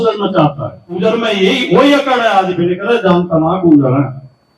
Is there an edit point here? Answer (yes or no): yes